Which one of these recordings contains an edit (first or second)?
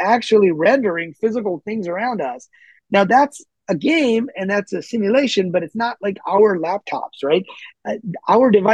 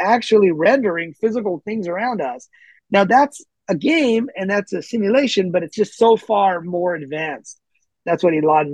second